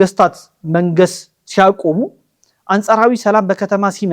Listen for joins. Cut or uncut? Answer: uncut